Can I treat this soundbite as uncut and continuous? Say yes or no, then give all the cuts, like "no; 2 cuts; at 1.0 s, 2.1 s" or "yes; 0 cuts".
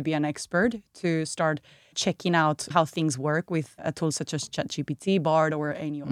no; 1 cut; at 3.7 s